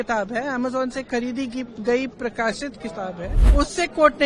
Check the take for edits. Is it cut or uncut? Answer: cut